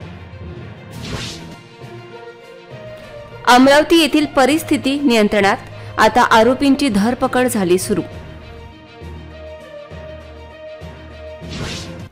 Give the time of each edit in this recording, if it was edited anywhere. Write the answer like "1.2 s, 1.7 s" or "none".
0.9 s